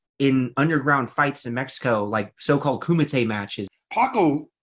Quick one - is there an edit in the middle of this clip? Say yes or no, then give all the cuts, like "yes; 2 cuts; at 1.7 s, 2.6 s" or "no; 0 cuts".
yes; 1 cut; at 3.6 s